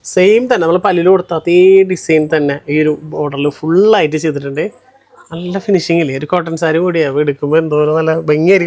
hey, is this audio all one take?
yes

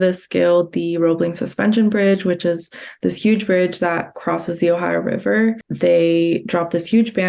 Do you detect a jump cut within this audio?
yes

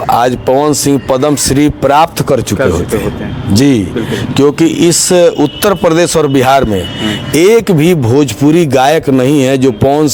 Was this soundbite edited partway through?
no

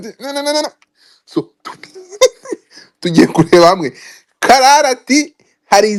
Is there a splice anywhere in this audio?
no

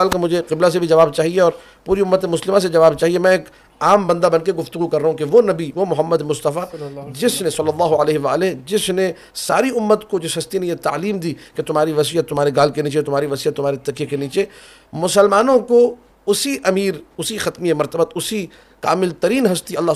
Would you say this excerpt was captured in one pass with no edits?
yes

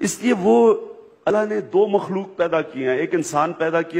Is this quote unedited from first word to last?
no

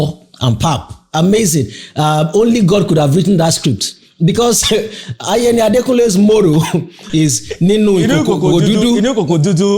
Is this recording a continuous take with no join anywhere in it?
no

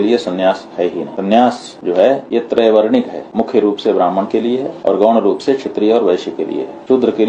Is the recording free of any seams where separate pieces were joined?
yes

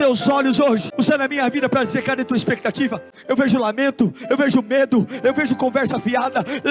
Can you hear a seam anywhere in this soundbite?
yes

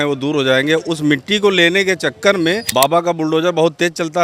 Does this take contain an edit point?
yes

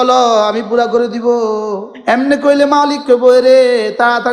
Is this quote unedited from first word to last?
no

